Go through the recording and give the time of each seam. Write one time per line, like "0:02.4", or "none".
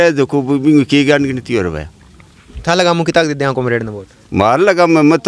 none